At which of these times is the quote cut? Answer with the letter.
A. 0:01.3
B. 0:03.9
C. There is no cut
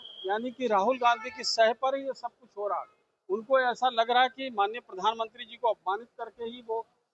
C